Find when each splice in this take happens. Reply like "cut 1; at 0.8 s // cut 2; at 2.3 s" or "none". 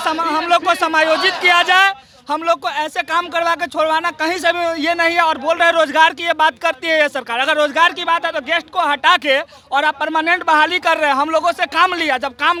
none